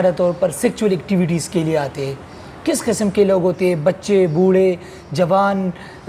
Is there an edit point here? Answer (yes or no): no